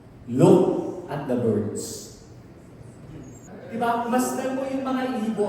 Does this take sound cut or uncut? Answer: cut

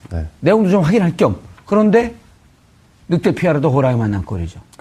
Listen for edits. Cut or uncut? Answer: uncut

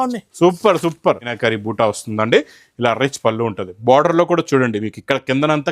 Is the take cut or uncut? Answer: cut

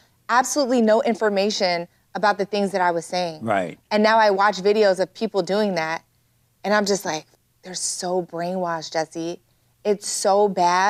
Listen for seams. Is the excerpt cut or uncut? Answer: uncut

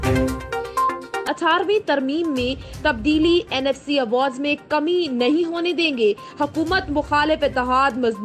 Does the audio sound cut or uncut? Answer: cut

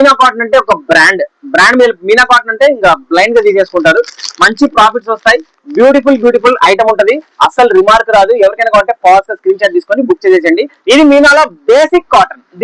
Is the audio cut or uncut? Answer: uncut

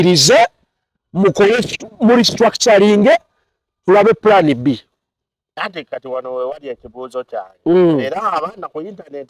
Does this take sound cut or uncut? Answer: uncut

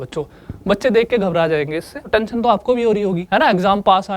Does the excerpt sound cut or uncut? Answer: cut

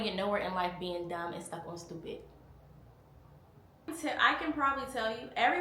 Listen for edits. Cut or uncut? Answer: uncut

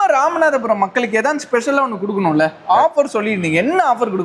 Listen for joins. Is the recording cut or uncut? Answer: uncut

